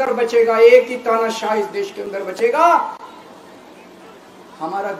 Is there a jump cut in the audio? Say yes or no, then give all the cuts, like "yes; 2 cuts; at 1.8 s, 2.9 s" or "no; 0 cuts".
no; 0 cuts